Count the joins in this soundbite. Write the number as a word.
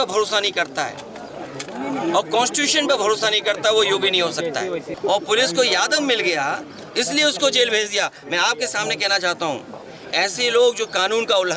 one